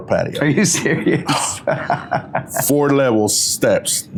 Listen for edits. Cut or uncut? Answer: uncut